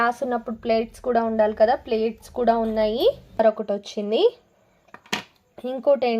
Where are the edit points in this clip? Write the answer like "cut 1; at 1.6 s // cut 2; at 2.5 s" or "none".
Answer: cut 1; at 3.4 s